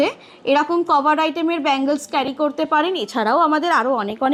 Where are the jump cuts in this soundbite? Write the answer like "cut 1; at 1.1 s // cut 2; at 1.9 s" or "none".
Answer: none